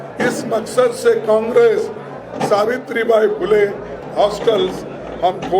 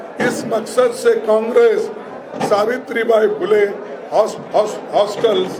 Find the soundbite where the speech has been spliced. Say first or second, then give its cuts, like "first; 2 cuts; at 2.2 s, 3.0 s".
first; 1 cut; at 4.0 s